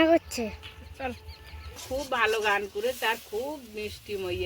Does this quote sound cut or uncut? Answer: cut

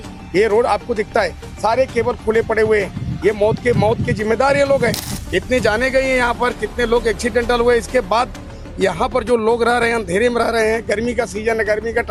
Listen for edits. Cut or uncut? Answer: uncut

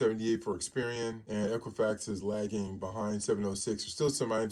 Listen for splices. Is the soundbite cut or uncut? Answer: uncut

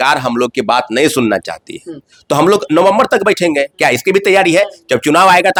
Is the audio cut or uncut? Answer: uncut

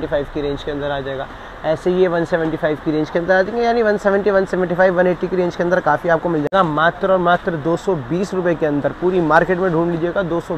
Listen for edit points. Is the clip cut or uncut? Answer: cut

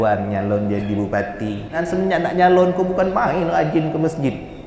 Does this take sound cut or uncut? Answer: cut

